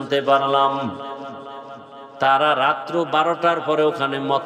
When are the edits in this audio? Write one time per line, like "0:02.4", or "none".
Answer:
none

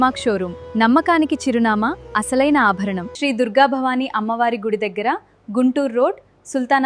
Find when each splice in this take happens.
0:03.0

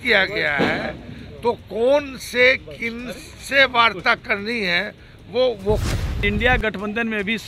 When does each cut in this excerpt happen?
0:06.2

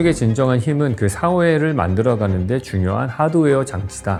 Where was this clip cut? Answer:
none

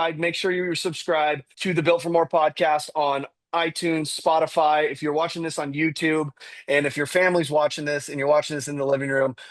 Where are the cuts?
0:01.5

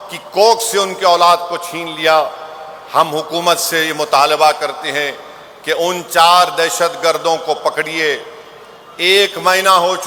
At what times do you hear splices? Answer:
none

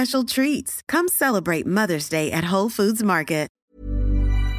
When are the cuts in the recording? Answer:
0:03.6

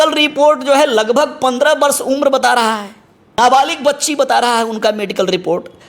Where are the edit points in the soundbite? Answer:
0:03.4

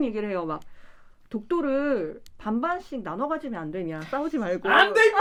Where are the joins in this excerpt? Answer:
none

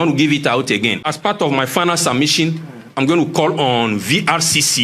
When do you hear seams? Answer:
0:01.1

